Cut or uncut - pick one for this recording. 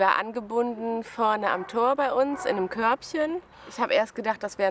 cut